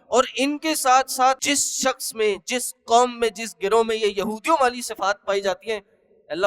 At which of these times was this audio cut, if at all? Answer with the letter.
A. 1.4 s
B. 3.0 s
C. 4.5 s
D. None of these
A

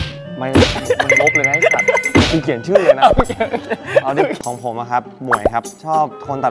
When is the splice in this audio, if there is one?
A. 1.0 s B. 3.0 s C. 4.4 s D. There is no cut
C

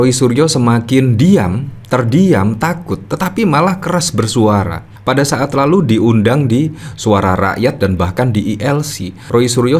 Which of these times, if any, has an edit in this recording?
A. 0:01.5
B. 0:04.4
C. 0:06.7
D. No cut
D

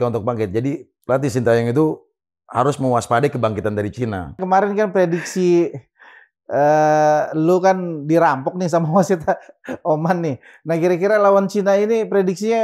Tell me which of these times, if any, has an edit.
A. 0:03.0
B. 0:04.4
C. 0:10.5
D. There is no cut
B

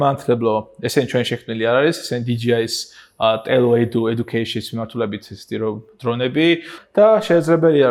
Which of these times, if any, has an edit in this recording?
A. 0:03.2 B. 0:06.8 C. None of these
B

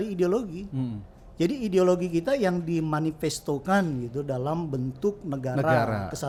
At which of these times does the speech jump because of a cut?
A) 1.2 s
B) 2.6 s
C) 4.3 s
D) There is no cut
D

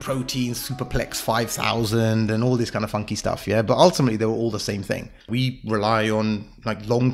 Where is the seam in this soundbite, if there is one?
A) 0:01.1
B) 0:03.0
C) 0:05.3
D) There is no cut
C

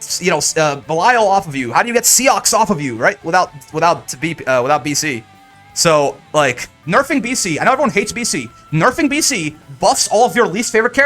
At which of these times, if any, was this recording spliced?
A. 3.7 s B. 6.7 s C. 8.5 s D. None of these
B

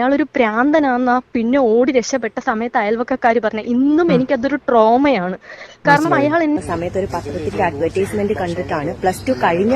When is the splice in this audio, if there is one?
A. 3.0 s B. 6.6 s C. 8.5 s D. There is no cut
B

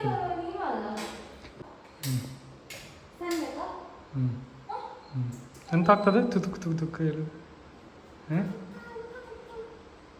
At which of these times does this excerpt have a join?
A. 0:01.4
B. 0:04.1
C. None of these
A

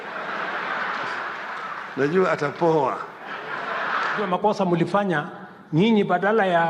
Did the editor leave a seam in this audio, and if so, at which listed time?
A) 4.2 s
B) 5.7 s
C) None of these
A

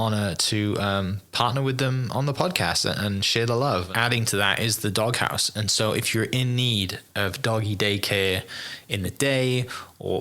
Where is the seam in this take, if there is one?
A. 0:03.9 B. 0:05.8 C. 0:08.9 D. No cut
A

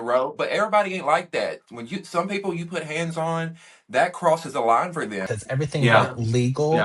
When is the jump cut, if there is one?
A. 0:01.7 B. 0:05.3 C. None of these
B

